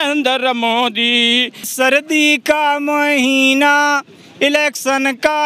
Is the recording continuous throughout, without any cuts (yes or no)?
no